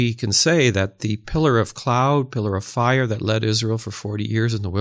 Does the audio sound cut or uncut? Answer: uncut